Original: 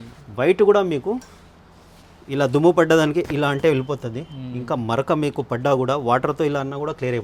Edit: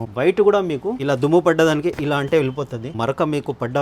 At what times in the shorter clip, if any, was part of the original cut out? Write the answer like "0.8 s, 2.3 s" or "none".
1.0 s, 2.9 s